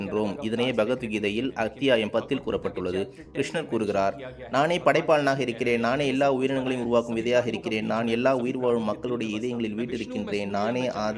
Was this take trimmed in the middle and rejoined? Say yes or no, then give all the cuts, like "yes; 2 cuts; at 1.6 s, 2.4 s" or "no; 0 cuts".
no; 0 cuts